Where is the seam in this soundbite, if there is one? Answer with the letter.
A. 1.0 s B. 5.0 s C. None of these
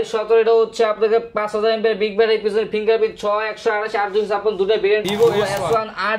B